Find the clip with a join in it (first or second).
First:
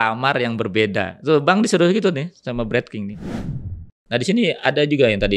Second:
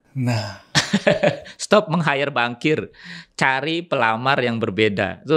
first